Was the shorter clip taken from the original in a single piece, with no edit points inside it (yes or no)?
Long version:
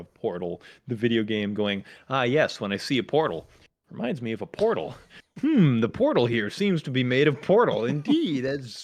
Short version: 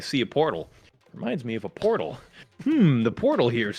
yes